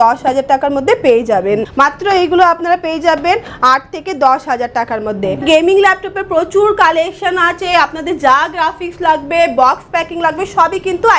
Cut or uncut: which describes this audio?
cut